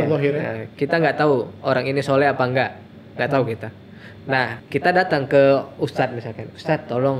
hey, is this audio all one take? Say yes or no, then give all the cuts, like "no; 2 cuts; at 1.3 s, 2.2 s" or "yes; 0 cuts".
no; 1 cut; at 4.6 s